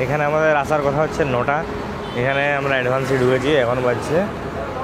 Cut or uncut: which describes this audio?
uncut